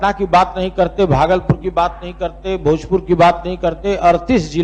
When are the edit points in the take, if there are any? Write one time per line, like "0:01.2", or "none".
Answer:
none